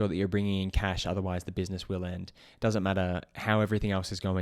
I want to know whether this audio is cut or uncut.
uncut